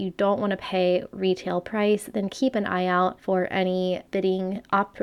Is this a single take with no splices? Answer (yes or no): no